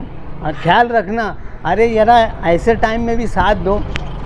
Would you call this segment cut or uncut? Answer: uncut